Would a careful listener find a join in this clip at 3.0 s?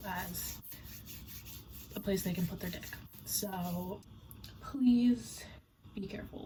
no; 0 cuts

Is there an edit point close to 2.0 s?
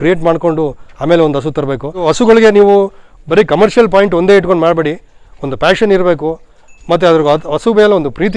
yes; 1 cut; at 2.0 s

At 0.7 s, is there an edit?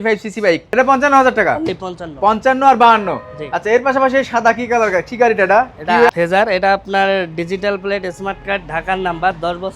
yes; 2 cuts; at 0.7 s, 6.1 s

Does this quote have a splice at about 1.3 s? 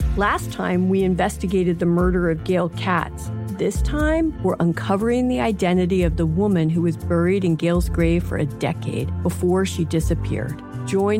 no; 0 cuts

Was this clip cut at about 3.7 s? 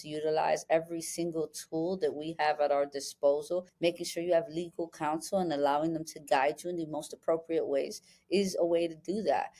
yes; 1 cut; at 3.7 s

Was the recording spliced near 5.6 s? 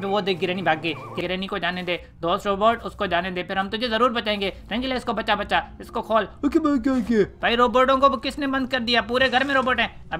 no; 2 cuts; at 1.2 s, 7.4 s

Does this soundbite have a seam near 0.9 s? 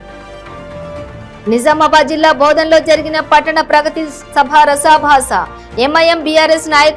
yes; 1 cut; at 0.9 s

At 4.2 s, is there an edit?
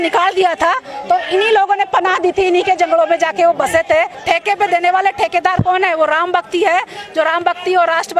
yes; 1 cut; at 4.2 s

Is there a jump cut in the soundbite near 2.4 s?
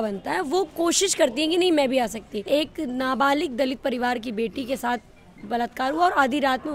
yes; 1 cut; at 2.4 s

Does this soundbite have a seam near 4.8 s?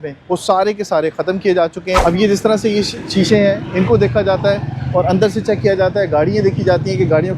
no; 1 cut; at 2.0 s

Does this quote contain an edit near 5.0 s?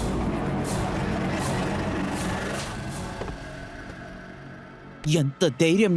yes; 1 cut; at 5.0 s

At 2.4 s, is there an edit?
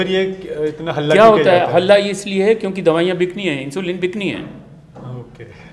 no; 0 cuts

